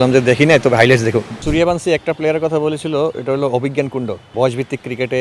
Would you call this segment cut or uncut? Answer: cut